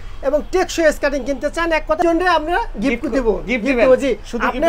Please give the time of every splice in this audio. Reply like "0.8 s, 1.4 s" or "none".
2.0 s